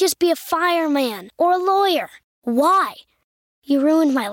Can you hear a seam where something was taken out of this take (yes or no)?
no